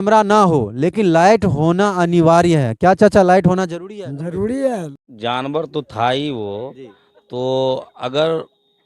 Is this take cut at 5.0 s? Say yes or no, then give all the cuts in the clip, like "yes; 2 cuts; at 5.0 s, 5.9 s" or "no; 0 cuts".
yes; 1 cut; at 5.0 s